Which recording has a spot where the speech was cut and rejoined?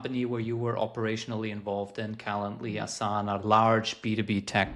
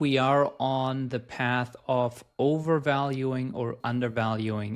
second; 1 cut; at 3.8 s

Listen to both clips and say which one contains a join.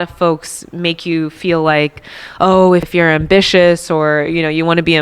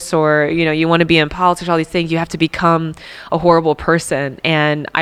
first; 1 cut; at 2.9 s

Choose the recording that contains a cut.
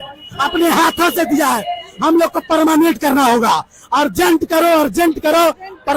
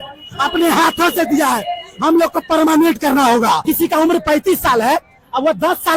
second; 1 cut; at 3.6 s

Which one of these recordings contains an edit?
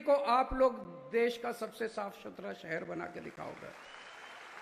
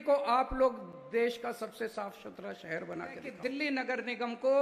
second; 1 cut; at 3.3 s

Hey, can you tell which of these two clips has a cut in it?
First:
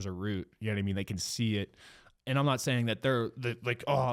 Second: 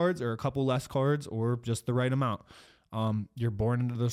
first; 1 cut; at 2.1 s

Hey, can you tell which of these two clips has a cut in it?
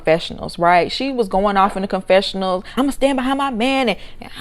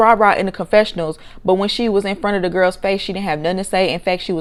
first; 1 cut; at 2.7 s

